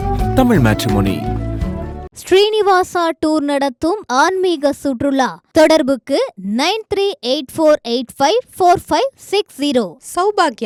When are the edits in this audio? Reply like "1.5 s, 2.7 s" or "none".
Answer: none